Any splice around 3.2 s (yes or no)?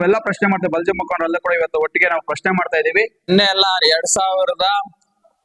yes